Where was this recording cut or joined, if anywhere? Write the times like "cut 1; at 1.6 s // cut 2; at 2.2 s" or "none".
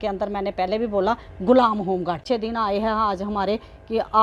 cut 1; at 2.2 s